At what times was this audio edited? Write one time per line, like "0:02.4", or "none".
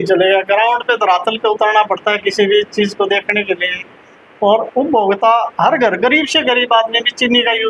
none